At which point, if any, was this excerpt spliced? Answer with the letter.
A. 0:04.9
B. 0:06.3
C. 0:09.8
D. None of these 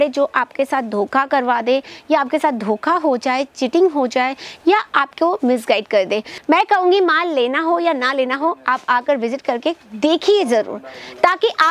B